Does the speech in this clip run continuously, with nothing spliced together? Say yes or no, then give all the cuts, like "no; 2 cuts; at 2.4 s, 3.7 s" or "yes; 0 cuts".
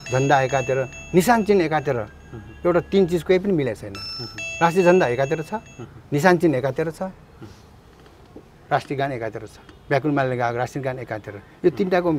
yes; 0 cuts